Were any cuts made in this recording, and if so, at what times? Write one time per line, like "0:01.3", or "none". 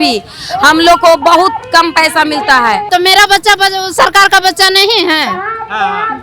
0:02.9